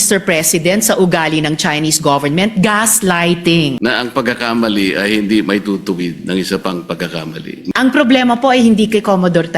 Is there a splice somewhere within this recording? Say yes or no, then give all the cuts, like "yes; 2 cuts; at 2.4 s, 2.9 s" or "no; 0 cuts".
yes; 2 cuts; at 3.8 s, 7.7 s